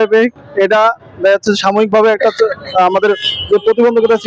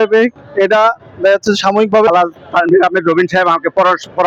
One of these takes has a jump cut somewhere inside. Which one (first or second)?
second